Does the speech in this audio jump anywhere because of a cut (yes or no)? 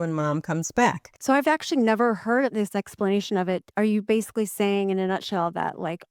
yes